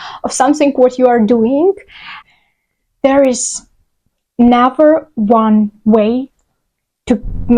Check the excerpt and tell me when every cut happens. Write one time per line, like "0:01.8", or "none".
0:02.2